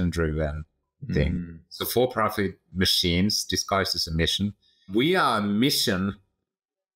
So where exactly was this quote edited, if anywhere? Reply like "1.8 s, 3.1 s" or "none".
4.9 s